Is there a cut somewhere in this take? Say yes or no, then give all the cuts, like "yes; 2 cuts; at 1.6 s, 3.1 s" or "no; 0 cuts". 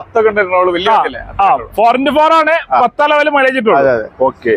no; 0 cuts